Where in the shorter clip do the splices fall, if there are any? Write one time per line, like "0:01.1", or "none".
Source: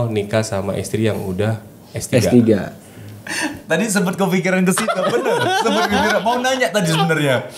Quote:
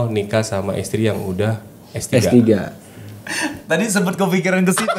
none